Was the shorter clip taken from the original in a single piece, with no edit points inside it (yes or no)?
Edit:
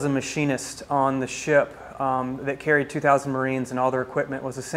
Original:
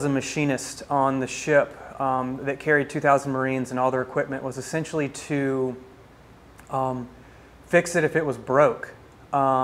yes